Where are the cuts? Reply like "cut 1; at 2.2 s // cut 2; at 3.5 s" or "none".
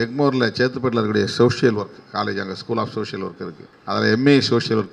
cut 1; at 3.7 s